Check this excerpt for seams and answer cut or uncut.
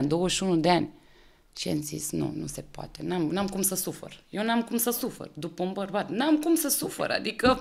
uncut